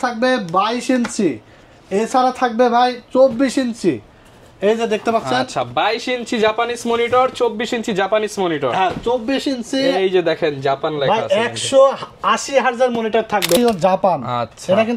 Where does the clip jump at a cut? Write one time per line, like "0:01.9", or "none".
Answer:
0:13.6